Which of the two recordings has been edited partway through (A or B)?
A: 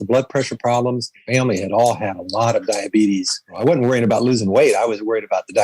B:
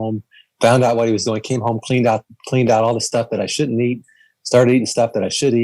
A